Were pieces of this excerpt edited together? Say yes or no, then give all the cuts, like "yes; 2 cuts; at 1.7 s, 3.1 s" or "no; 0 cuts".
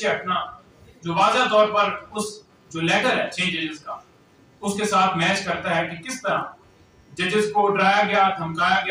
no; 0 cuts